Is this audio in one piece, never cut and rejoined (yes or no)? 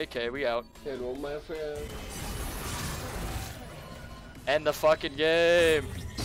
yes